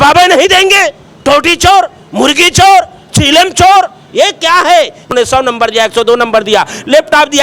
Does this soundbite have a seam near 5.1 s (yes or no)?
yes